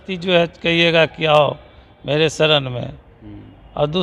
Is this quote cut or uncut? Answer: uncut